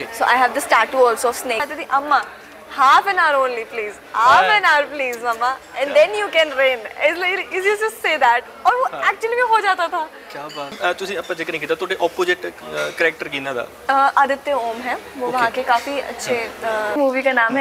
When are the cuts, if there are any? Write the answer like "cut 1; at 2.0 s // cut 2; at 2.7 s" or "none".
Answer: cut 1; at 1.6 s // cut 2; at 10.7 s